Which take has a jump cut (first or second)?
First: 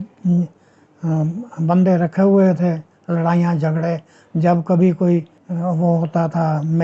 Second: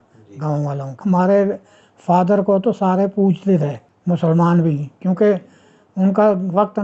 second